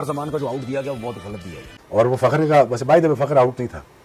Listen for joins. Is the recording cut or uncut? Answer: cut